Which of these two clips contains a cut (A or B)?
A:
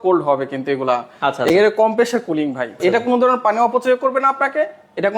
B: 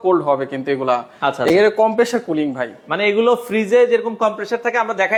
A